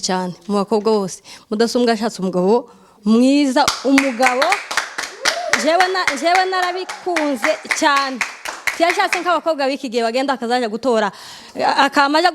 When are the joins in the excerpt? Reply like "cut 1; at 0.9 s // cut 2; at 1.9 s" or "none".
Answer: cut 1; at 3.7 s